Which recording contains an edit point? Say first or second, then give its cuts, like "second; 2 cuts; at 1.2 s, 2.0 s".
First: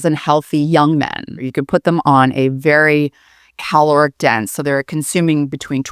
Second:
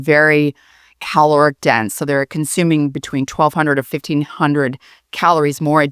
first; 1 cut; at 1.4 s